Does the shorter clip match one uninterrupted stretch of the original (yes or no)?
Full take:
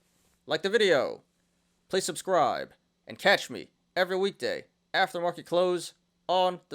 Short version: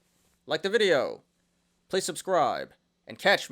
yes